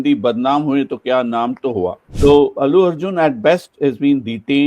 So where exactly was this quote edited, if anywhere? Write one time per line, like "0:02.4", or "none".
0:02.0